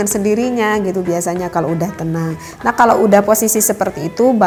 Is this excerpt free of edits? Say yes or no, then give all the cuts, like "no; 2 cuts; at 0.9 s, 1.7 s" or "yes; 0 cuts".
yes; 0 cuts